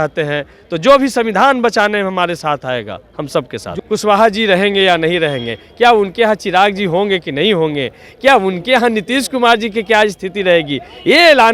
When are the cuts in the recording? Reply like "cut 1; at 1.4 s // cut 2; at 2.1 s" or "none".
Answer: cut 1; at 3.6 s

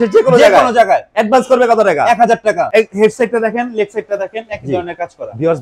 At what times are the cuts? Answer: cut 1; at 2.7 s

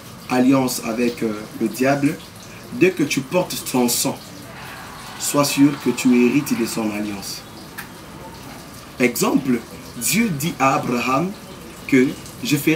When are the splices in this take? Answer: none

